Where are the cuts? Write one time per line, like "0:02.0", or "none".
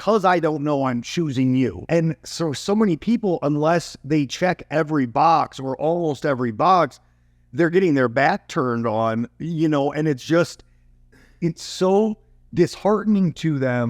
0:01.8